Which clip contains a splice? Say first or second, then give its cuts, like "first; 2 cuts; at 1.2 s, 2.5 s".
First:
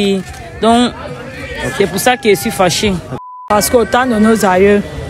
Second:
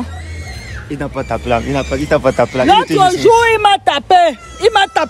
first; 1 cut; at 3.1 s